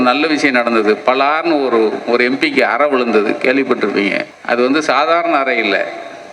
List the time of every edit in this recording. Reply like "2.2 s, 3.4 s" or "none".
4.2 s